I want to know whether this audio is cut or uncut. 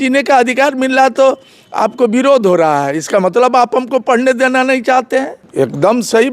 cut